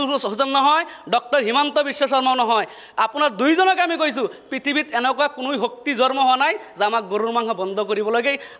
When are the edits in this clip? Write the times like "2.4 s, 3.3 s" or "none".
none